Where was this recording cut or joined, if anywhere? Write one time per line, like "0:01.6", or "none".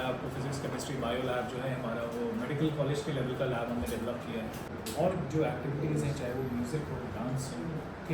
0:04.8